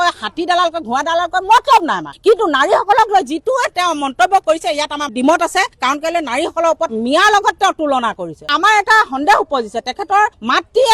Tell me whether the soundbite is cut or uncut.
uncut